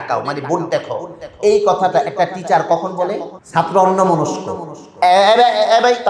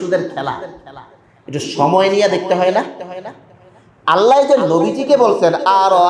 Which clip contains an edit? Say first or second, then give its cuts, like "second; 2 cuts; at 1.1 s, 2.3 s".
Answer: first; 1 cut; at 3.4 s